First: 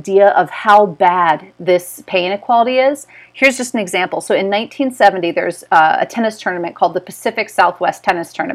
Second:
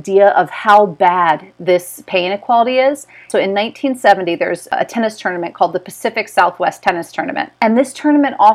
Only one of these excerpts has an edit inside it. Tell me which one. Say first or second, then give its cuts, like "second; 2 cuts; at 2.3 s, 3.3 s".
second; 3 cuts; at 3.2 s, 4.7 s, 7.5 s